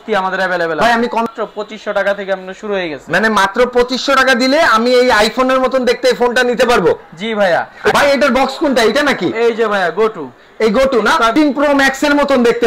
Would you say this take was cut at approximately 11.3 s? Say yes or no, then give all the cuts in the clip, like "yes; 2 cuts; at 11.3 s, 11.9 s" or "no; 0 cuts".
yes; 3 cuts; at 1.3 s, 7.9 s, 11.3 s